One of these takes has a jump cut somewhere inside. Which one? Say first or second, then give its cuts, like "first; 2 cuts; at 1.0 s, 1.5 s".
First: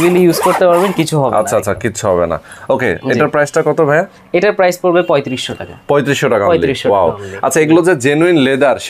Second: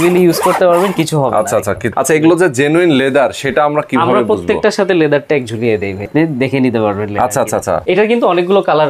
second; 3 cuts; at 1.9 s, 6.1 s, 7.8 s